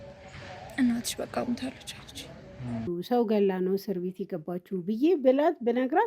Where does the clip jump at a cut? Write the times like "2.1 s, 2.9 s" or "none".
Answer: 2.8 s